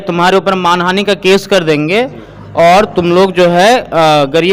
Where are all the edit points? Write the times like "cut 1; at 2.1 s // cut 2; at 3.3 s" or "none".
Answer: none